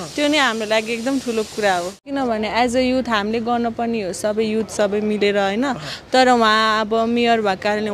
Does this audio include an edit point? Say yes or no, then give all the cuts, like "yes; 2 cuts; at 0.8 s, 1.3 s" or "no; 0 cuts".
no; 0 cuts